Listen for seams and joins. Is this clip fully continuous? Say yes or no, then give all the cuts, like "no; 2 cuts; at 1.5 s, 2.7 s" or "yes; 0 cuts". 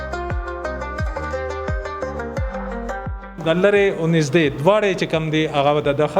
no; 1 cut; at 3.4 s